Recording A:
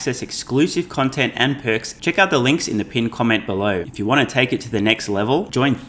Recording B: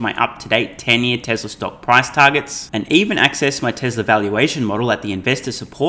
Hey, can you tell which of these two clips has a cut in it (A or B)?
A